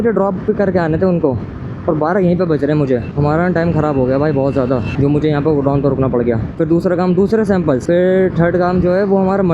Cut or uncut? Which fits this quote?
cut